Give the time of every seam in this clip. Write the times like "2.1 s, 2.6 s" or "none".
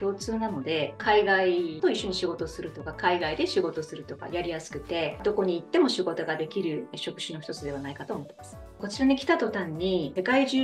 none